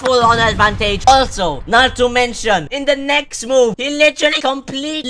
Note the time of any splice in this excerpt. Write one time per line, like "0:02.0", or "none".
0:01.1